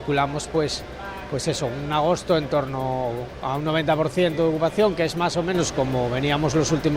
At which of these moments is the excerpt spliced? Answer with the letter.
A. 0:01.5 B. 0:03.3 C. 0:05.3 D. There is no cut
D